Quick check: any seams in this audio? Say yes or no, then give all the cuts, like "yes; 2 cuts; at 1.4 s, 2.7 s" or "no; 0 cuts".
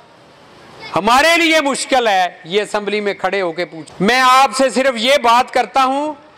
yes; 1 cut; at 3.8 s